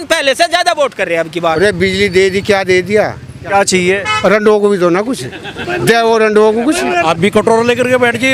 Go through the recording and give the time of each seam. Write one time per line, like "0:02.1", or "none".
0:01.6
0:03.5
0:07.0